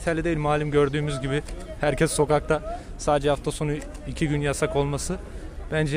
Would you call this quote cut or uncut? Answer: uncut